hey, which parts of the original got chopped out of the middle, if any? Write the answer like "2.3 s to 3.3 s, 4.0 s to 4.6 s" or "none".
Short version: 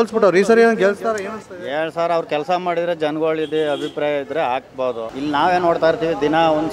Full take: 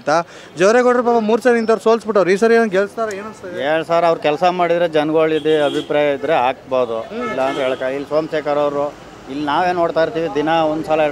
7.0 s to 9.2 s